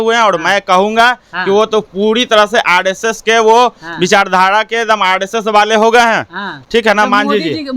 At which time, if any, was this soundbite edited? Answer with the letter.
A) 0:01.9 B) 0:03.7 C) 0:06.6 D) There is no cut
D